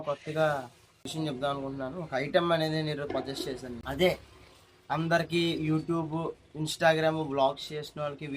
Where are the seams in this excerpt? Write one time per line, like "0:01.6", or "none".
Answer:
0:01.1
0:03.7